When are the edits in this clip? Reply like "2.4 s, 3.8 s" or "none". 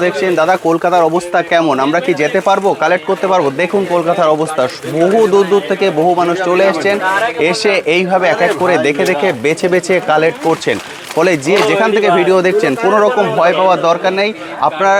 none